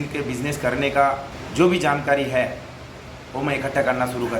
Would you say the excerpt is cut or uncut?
cut